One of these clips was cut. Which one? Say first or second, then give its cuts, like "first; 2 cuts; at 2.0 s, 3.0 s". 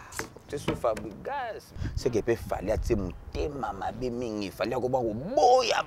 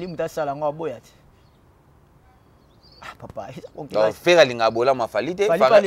first; 1 cut; at 1.8 s